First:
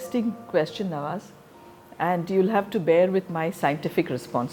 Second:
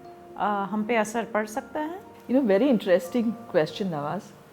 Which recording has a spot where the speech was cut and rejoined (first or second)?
second